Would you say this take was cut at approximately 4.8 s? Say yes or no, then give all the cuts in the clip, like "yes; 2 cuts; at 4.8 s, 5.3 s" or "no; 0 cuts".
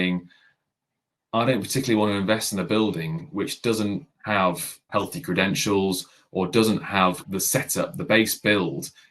yes; 3 cuts; at 4.1 s, 4.8 s, 7.2 s